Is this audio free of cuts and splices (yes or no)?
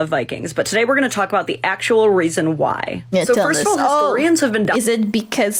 yes